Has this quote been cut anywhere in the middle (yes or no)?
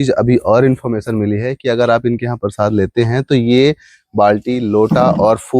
no